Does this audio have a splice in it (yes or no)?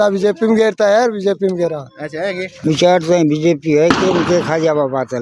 yes